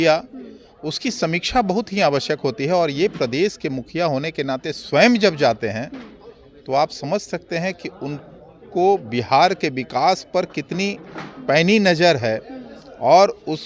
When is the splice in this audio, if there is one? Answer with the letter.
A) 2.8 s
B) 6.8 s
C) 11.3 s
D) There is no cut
D